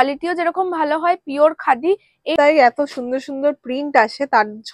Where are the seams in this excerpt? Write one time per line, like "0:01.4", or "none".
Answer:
0:02.3